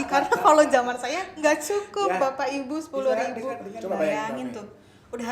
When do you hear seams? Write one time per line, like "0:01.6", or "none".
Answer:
0:03.7